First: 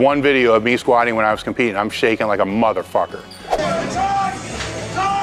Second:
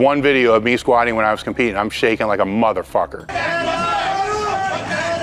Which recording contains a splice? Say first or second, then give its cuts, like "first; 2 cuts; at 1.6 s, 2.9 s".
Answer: second; 1 cut; at 3.3 s